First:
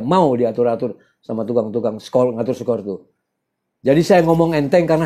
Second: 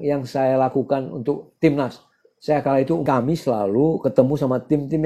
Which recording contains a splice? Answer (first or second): second